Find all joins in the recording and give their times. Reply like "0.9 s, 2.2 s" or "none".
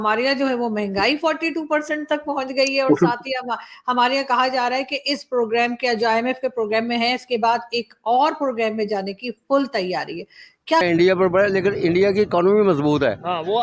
10.8 s

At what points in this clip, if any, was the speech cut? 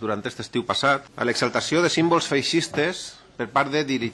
1.1 s

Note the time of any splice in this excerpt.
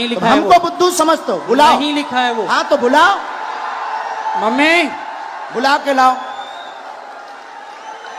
none

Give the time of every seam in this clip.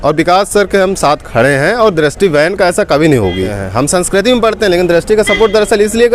3.6 s

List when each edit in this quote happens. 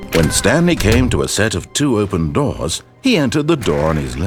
none

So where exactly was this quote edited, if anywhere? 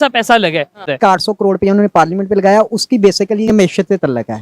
0.9 s, 3.5 s

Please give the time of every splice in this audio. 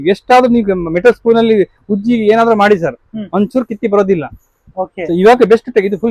none

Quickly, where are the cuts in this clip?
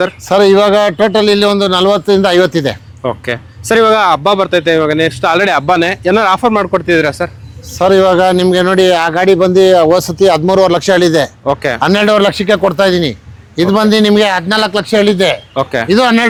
none

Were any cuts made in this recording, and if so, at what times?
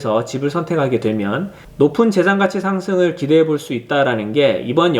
1.6 s

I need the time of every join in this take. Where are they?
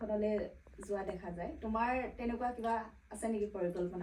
none

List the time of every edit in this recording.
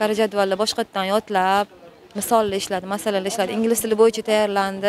none

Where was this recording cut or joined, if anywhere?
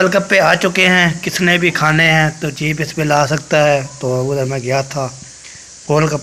none

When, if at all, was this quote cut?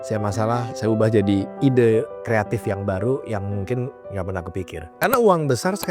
1.5 s, 4.8 s

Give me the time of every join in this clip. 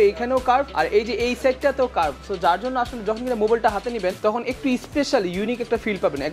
none

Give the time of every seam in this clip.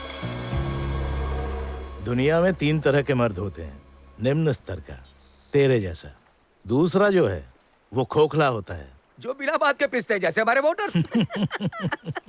1.6 s

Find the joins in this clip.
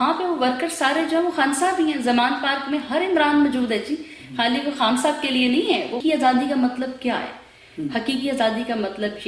6.0 s

